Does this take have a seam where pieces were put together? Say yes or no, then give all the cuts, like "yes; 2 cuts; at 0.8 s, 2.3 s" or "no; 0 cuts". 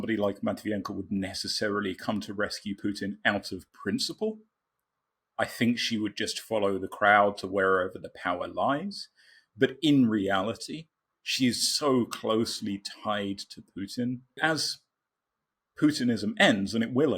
yes; 1 cut; at 14.4 s